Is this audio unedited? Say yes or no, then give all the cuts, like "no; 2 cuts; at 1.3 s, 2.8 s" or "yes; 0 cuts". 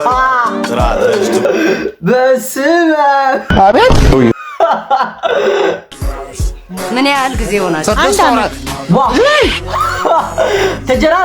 no; 2 cuts; at 1.4 s, 5.8 s